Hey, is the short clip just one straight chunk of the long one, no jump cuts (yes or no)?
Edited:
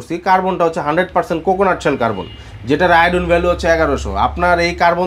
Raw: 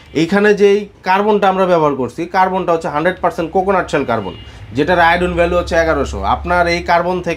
yes